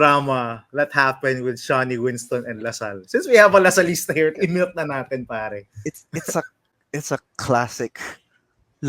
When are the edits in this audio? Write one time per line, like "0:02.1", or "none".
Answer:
0:04.4